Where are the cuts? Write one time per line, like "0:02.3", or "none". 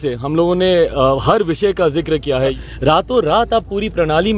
0:02.6